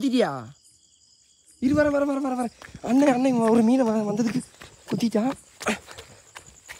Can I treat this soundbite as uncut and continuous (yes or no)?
yes